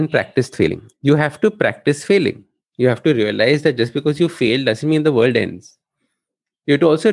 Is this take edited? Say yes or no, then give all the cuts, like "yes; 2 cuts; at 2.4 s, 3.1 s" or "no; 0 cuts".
no; 0 cuts